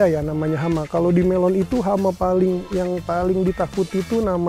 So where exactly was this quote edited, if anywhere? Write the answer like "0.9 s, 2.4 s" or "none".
none